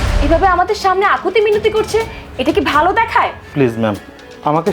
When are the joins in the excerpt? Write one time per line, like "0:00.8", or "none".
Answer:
0:03.4